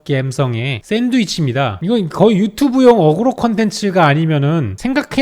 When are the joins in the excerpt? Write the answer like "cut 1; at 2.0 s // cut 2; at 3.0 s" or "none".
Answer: cut 1; at 1.7 s